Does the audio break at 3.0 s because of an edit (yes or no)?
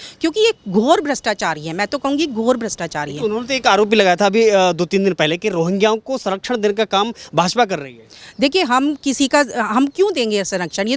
no